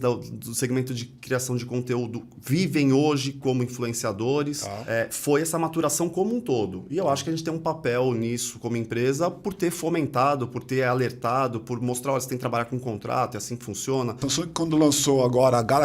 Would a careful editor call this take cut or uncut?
cut